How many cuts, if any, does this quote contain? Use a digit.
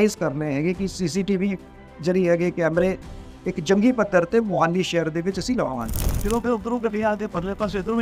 1